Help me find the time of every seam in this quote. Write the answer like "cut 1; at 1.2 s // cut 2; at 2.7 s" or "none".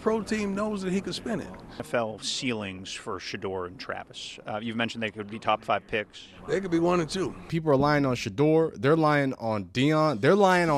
cut 1; at 1.9 s // cut 2; at 7.5 s